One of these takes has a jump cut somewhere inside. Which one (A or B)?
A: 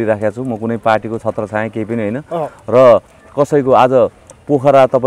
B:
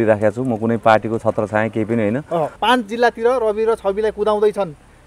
B